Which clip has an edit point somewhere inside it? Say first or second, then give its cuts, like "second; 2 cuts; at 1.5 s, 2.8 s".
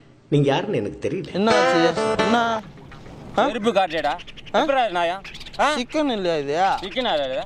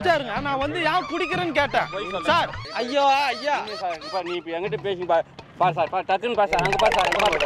second; 1 cut; at 2.6 s